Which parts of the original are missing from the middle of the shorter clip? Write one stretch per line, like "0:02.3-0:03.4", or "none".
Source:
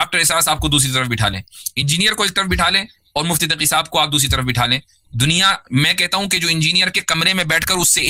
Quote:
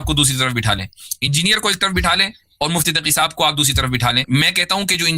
0:04.8-0:05.7